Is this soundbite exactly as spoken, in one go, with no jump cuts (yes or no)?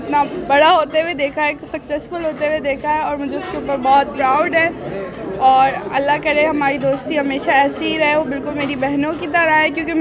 yes